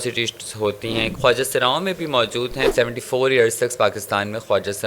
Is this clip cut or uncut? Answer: cut